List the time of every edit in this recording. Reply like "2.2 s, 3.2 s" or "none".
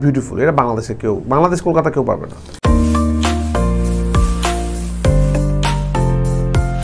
none